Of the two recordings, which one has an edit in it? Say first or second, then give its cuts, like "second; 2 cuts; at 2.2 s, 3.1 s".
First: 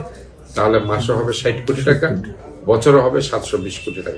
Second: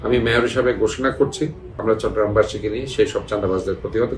second; 1 cut; at 1.7 s